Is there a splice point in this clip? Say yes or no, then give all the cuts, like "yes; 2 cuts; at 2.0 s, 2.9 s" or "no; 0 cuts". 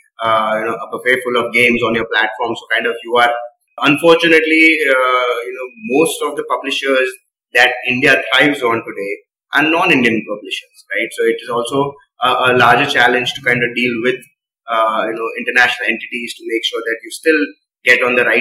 yes; 1 cut; at 3.6 s